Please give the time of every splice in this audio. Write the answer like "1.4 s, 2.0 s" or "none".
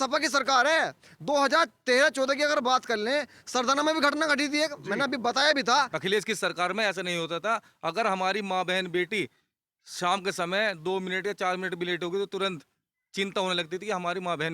5.9 s